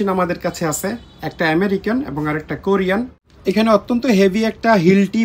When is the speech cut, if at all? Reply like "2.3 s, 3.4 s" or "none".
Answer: 3.3 s